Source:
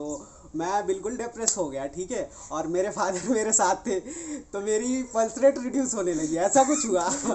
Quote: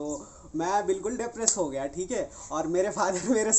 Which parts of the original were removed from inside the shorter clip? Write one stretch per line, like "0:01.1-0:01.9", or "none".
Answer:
none